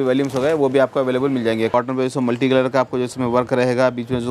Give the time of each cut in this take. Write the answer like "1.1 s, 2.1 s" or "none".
1.7 s